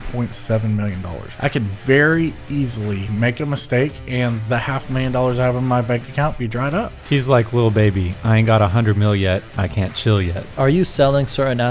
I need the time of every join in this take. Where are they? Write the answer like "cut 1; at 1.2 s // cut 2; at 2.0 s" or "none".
cut 1; at 1.2 s // cut 2; at 3.1 s // cut 3; at 7.0 s // cut 4; at 10.4 s